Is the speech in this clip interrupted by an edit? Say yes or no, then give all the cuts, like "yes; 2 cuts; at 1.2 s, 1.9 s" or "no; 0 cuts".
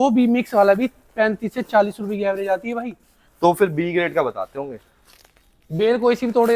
no; 0 cuts